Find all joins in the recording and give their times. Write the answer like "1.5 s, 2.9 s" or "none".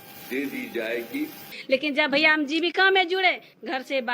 1.6 s